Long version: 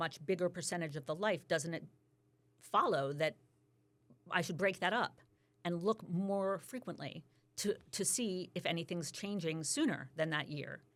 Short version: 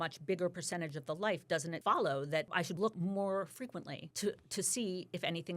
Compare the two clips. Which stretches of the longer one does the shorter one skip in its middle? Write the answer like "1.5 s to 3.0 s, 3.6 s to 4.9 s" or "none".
1.8 s to 2.7 s, 3.8 s to 6.0 s, 7.1 s to 7.4 s